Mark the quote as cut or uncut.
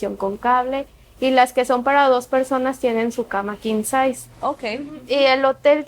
cut